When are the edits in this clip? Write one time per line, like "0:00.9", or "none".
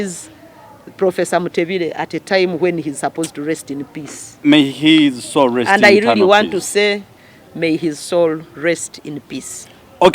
none